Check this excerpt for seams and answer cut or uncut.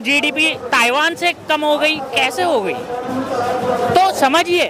uncut